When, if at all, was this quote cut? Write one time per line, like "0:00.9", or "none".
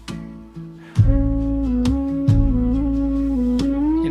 none